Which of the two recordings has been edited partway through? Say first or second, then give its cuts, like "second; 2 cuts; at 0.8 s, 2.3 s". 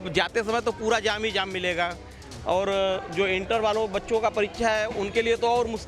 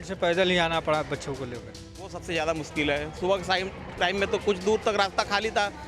second; 1 cut; at 2.2 s